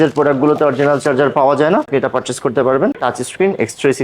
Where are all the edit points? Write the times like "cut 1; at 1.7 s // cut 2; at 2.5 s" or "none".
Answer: cut 1; at 1.9 s // cut 2; at 3.0 s